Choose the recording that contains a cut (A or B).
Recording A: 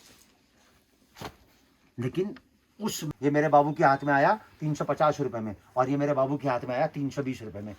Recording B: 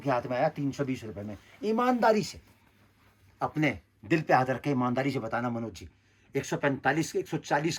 A